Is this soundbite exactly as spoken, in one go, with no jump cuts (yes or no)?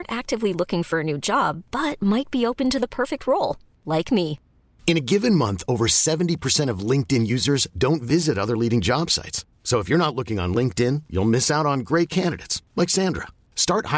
yes